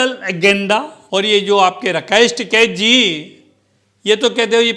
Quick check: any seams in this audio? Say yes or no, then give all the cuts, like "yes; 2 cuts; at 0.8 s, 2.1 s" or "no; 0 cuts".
yes; 1 cut; at 1.0 s